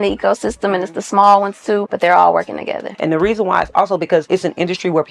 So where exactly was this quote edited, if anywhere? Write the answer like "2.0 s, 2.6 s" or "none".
1.9 s, 2.9 s, 4.3 s

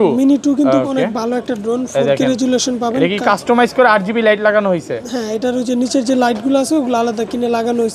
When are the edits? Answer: none

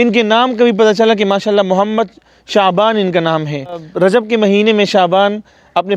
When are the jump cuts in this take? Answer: 3.9 s

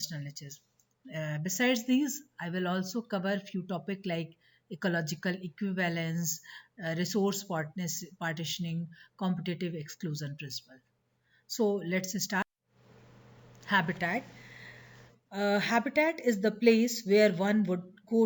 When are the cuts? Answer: 12.4 s

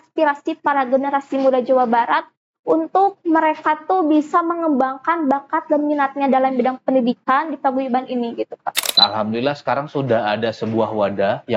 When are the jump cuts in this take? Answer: 9.0 s

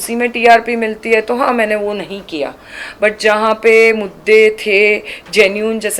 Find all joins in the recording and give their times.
none

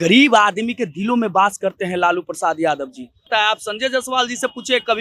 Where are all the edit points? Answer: 3.2 s

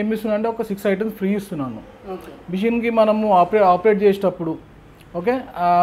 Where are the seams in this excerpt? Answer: none

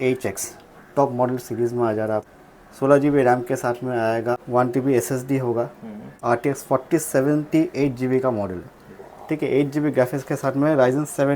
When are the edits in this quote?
2.3 s, 4.4 s, 6.1 s

